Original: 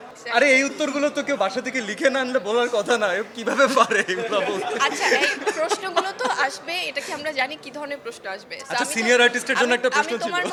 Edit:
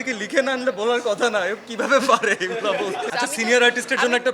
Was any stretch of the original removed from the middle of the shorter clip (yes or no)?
yes